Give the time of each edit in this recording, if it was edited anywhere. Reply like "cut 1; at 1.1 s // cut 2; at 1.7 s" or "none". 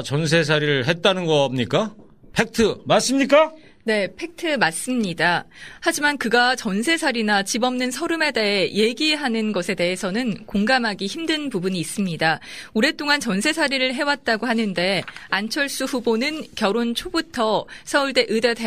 none